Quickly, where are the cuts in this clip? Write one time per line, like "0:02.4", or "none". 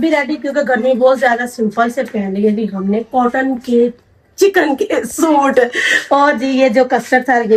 none